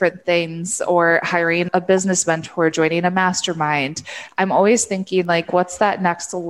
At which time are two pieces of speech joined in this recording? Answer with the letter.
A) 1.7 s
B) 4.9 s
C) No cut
A